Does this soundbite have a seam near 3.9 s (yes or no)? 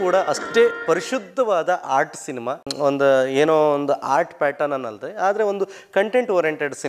no